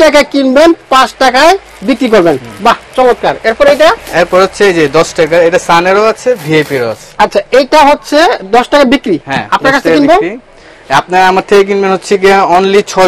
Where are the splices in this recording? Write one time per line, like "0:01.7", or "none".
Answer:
none